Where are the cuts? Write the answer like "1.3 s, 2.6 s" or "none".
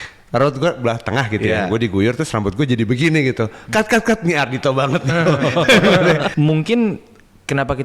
6.3 s